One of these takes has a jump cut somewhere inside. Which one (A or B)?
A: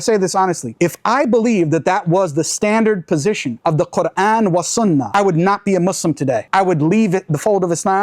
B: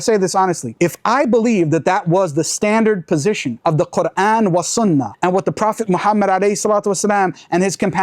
A